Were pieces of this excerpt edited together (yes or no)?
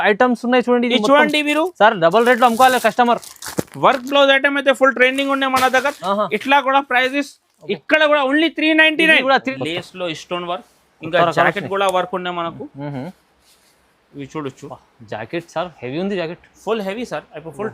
yes